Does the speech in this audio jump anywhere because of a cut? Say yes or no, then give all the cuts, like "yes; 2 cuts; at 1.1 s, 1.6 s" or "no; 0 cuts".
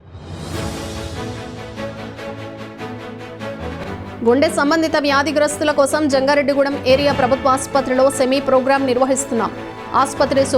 no; 0 cuts